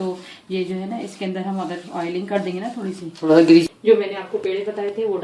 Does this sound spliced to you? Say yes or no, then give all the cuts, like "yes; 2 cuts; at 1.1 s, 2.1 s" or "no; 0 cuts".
yes; 1 cut; at 3.7 s